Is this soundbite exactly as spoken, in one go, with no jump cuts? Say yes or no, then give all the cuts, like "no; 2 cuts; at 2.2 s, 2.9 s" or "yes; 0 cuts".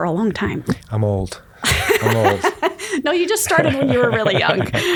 yes; 0 cuts